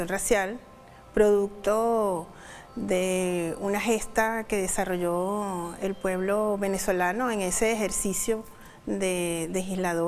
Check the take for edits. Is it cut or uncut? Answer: cut